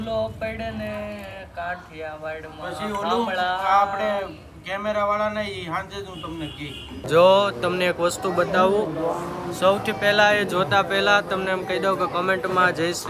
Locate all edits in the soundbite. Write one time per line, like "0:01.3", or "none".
0:07.0